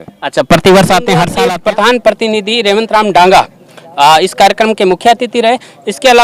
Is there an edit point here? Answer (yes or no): yes